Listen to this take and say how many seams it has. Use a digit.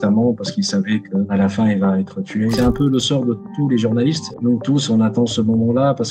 2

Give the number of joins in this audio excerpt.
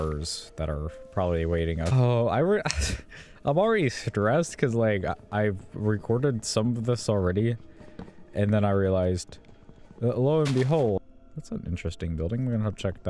2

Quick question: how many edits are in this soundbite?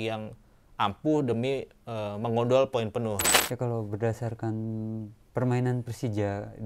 1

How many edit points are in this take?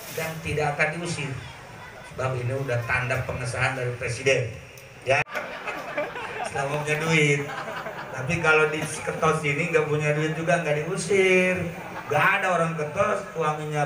1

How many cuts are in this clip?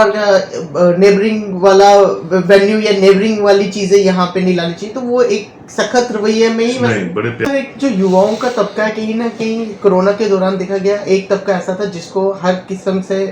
1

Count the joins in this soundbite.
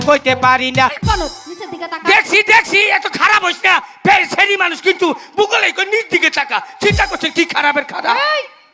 1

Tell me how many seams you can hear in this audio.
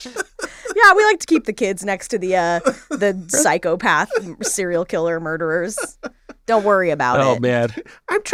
0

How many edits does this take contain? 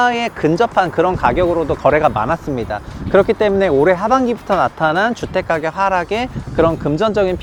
0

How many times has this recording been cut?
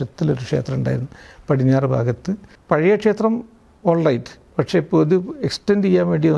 1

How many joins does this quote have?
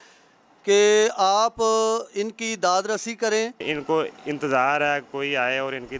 1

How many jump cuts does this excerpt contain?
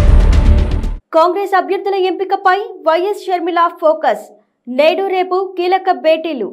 1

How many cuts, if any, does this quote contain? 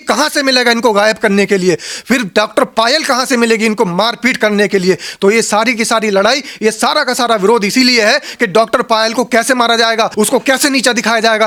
0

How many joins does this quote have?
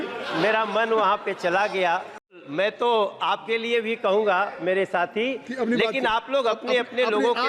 1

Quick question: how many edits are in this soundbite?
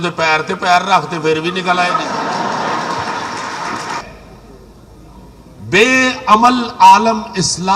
1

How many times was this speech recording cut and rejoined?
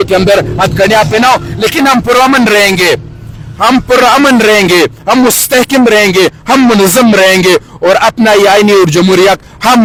0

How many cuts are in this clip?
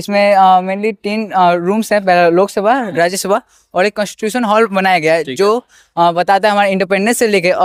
0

